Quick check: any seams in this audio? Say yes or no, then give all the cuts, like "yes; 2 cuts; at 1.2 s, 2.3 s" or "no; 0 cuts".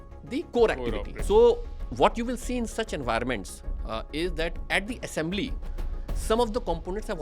yes; 1 cut; at 1.1 s